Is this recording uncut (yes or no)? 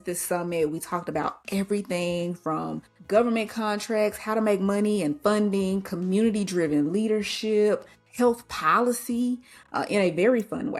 no